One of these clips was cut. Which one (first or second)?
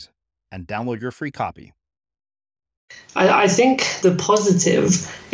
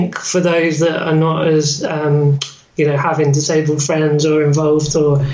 first